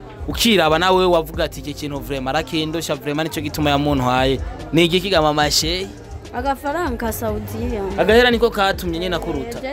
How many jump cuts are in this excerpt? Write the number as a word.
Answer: zero